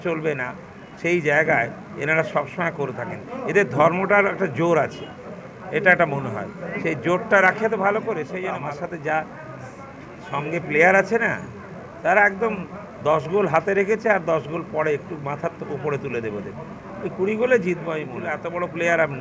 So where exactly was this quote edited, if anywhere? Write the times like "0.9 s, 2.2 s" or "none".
8.4 s, 18.2 s

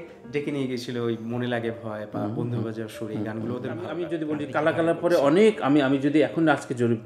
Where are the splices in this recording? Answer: 4.0 s

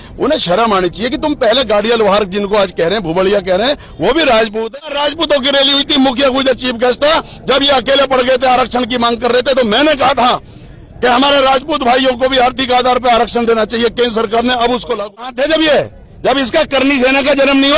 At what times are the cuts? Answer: 4.8 s, 15.3 s

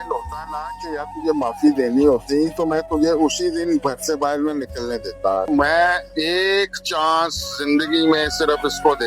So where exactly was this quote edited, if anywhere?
5.5 s

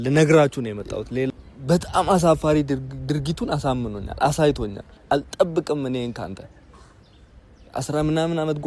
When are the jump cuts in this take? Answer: 1.3 s

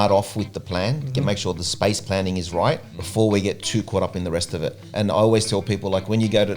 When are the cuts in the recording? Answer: 3.0 s

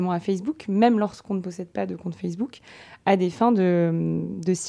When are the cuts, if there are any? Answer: none

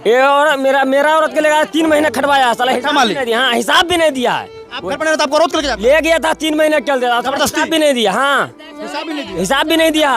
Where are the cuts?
none

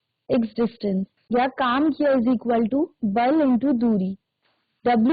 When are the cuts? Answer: 1.2 s

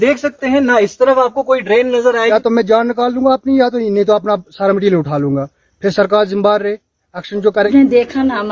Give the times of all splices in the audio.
2.3 s, 7.7 s

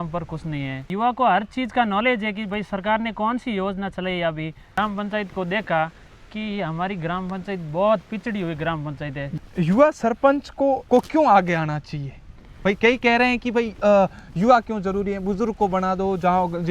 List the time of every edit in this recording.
0.9 s, 4.8 s, 9.3 s, 10.8 s

